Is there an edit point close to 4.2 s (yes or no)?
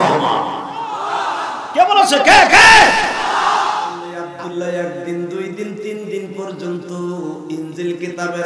yes